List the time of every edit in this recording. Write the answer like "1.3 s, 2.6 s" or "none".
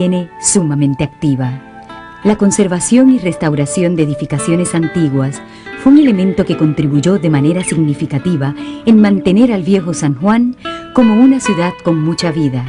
11.7 s